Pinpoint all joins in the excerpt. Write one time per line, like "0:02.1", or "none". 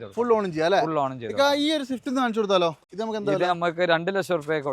0:02.9